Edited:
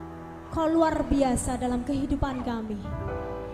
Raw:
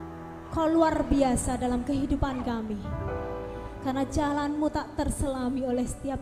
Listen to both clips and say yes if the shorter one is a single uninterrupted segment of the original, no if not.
yes